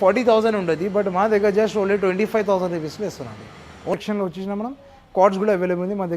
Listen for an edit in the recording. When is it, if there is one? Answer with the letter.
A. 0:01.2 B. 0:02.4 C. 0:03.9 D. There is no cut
C